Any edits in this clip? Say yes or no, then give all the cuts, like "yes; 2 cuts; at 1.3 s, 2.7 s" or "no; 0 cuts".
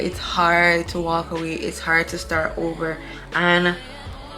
yes; 1 cut; at 3.1 s